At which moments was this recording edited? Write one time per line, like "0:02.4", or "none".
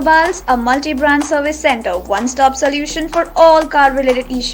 none

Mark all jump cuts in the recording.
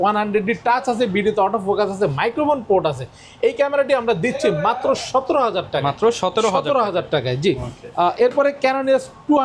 none

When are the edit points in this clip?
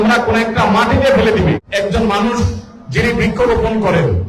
0:01.6

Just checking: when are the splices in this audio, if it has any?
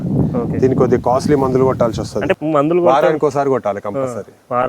0:02.4

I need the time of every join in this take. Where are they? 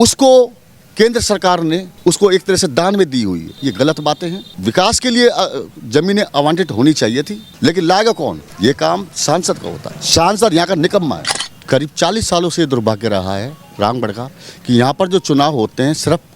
0:07.4
0:11.4

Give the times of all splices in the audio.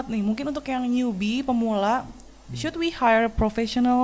none

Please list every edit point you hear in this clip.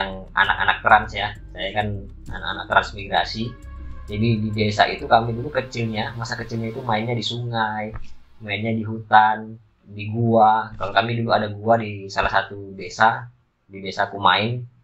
none

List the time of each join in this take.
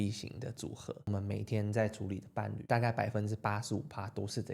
0:01.1
0:02.6

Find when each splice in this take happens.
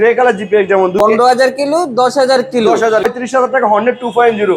0:01.2
0:03.1

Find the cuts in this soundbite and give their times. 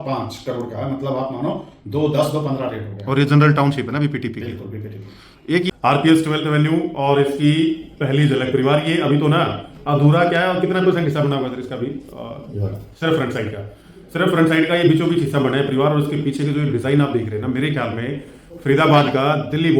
0:05.7

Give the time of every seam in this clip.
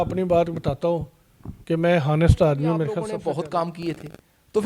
0:03.0

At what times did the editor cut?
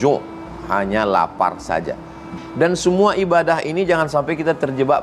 0:02.4

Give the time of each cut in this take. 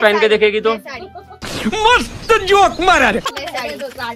none

